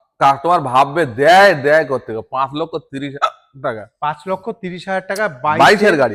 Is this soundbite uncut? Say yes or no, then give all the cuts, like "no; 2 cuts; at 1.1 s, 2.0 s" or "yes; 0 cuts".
yes; 0 cuts